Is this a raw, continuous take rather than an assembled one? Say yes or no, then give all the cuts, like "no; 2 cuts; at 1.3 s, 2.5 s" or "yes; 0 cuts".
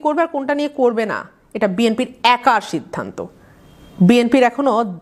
yes; 0 cuts